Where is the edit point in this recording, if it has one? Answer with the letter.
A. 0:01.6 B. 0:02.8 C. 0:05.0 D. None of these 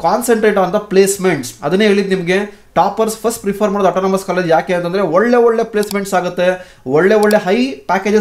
D